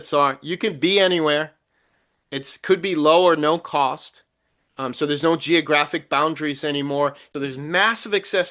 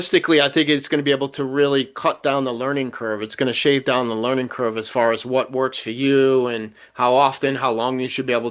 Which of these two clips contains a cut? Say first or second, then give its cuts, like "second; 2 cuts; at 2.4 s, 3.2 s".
first; 1 cut; at 7.2 s